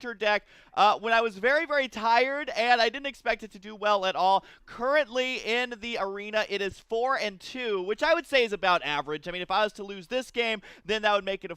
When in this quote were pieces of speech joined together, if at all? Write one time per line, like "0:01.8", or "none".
0:08.4